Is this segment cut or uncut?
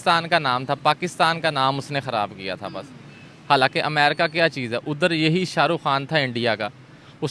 uncut